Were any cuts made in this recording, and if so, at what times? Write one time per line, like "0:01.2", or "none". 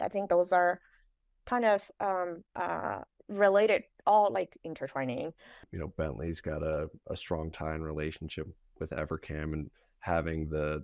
0:05.6